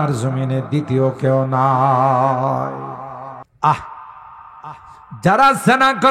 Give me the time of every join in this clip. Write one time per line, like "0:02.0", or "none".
0:03.4